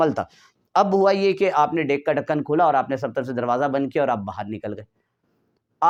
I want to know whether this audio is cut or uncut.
uncut